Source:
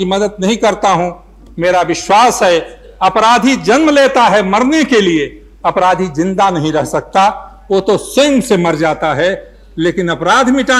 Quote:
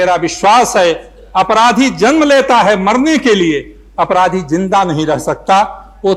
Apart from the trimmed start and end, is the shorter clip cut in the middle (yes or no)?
no